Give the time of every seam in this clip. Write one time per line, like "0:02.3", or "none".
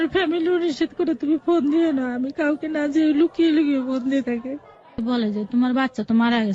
0:05.0